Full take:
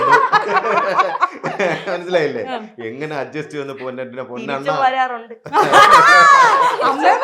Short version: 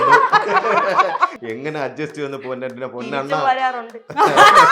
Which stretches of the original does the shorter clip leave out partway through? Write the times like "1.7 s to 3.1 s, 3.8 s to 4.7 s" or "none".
1.4 s to 2.7 s